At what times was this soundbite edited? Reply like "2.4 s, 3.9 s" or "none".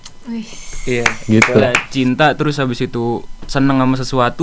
1.7 s